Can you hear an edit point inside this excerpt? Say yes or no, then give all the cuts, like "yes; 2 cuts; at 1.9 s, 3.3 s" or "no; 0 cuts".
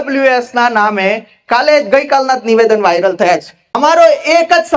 yes; 1 cut; at 3.8 s